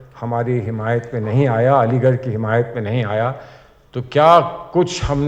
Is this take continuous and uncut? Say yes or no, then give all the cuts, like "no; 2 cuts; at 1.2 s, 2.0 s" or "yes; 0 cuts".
yes; 0 cuts